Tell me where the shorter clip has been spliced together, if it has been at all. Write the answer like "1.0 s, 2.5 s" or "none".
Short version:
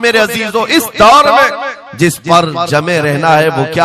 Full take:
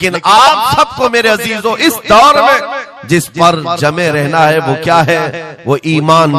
none